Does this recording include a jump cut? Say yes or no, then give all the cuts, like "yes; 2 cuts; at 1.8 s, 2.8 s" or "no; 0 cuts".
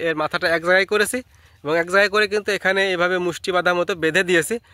no; 0 cuts